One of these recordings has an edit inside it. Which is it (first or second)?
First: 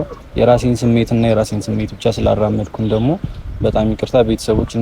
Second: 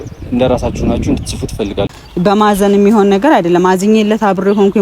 second